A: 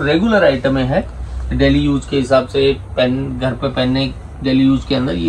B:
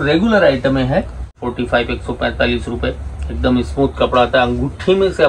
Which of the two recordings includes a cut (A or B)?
B